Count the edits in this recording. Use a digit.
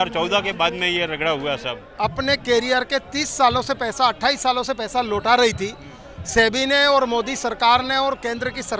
1